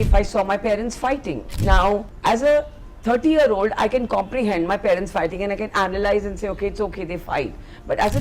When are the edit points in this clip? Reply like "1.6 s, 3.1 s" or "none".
1.6 s